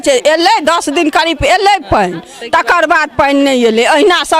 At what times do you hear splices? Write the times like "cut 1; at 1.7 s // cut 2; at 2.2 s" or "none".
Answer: none

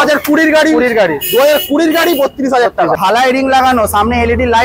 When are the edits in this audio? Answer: cut 1; at 3.0 s

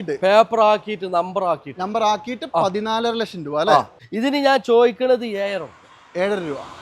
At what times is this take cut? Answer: cut 1; at 4.0 s

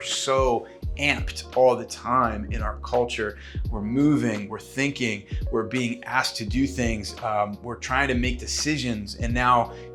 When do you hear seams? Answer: none

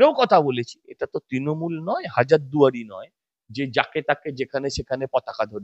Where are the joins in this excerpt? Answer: cut 1; at 0.9 s

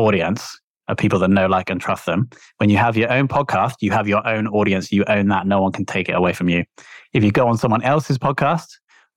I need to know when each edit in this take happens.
none

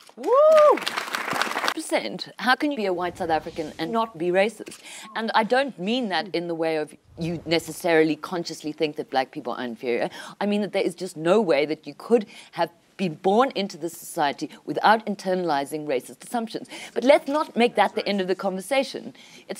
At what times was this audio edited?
cut 1; at 1.7 s

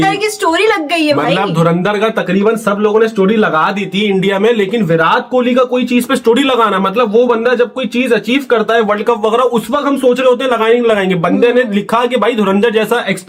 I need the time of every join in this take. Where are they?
none

